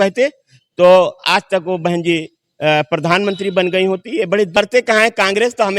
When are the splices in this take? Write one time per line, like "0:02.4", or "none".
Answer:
0:04.6